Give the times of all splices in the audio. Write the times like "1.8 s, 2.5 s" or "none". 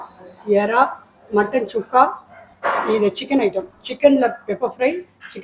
none